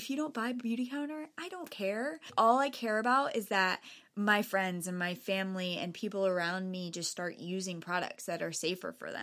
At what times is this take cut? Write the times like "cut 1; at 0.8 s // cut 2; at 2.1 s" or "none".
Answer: cut 1; at 2.3 s